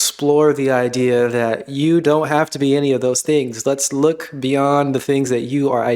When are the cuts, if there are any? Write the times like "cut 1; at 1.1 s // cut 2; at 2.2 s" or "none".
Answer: none

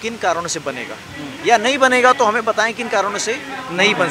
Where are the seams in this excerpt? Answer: none

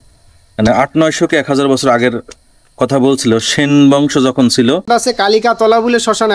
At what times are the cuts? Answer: cut 1; at 4.9 s

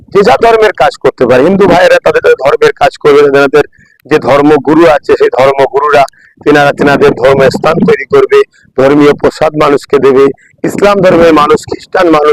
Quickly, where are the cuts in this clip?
none

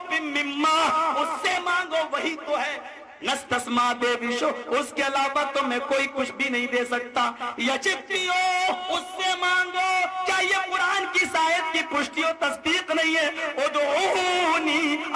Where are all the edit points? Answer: cut 1; at 6.4 s

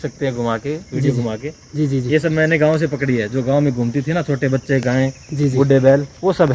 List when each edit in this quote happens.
none

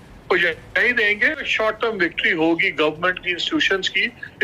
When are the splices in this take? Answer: cut 1; at 1.5 s

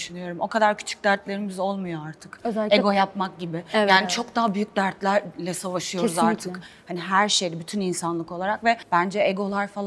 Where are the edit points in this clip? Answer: none

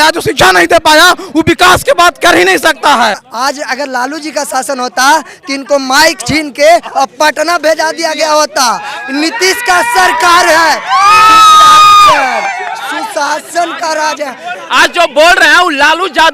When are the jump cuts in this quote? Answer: cut 1; at 3.3 s // cut 2; at 14.6 s

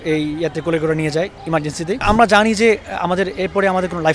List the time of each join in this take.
cut 1; at 2.0 s

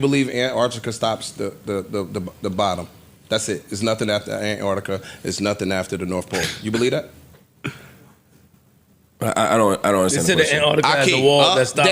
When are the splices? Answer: none

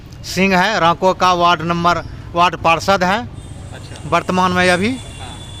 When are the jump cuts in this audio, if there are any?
none

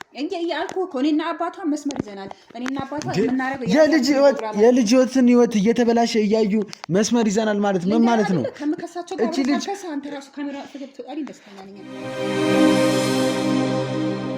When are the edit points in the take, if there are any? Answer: cut 1; at 11.8 s

